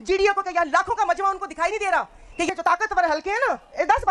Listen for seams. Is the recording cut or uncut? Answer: cut